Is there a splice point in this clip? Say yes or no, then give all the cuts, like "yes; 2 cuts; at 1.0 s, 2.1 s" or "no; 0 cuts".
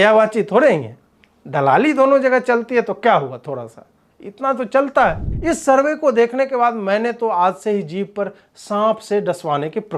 yes; 1 cut; at 5.3 s